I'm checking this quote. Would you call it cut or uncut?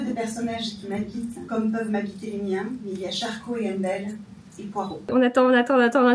cut